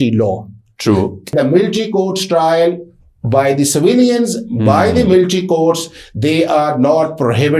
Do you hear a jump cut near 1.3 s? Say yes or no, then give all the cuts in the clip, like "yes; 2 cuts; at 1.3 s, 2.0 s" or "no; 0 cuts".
yes; 1 cut; at 1.3 s